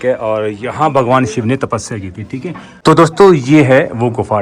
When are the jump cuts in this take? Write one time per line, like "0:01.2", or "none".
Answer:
0:02.7